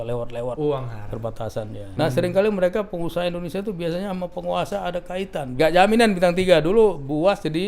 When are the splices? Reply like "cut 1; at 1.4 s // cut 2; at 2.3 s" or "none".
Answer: cut 1; at 1.8 s // cut 2; at 5.4 s